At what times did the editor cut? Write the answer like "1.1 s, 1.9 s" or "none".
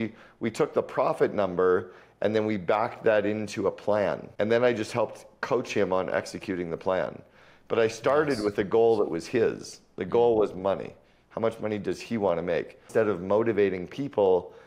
4.3 s, 12.9 s